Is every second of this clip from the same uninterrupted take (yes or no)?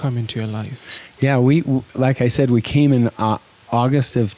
yes